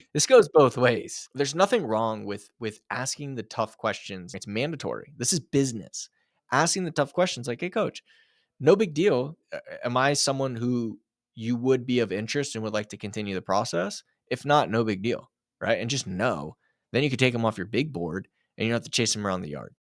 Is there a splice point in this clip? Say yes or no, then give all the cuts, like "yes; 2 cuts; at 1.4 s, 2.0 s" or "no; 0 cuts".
yes; 3 cuts; at 1.2 s, 4.4 s, 9.4 s